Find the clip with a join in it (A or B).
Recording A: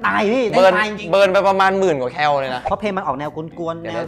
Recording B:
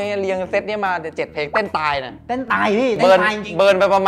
A